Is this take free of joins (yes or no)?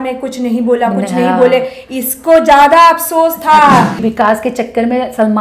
no